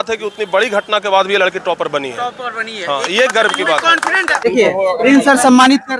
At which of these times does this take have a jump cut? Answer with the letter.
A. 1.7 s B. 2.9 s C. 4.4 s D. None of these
C